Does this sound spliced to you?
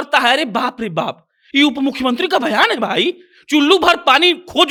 no; 0 cuts

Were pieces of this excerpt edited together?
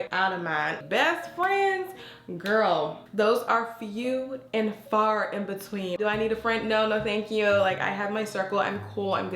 yes; 2 cuts; at 0.8 s, 6.0 s

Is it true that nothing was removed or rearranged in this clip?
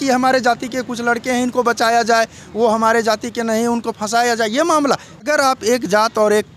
no; 1 cut; at 5.2 s

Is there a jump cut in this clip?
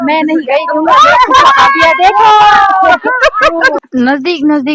yes; 1 cut; at 3.8 s

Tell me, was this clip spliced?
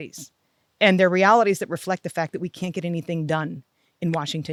no; 0 cuts

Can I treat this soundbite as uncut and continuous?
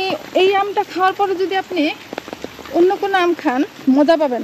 yes; 0 cuts

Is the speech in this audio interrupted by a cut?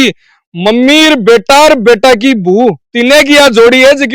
no; 0 cuts

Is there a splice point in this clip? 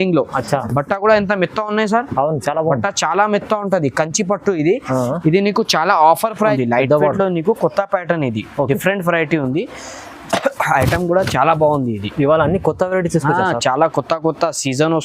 yes; 1 cut; at 6.5 s

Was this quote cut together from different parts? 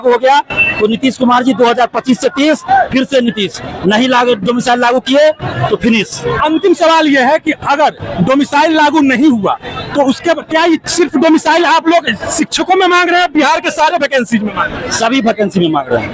no; 0 cuts

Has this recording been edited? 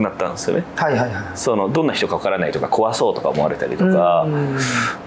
no; 0 cuts

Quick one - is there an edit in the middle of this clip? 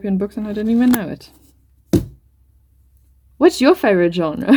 no; 0 cuts

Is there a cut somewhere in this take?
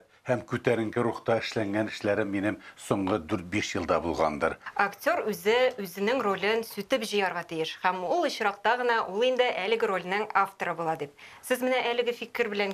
yes; 1 cut; at 4.6 s

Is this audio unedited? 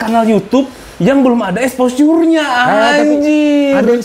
yes; 0 cuts

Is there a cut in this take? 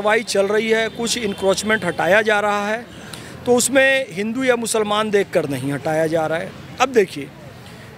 no; 0 cuts

